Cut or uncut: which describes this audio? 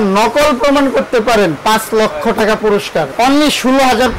cut